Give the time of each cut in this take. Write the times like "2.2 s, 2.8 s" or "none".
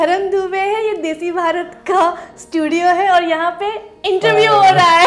none